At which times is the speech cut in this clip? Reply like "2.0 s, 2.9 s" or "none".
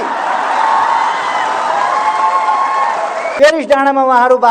3.2 s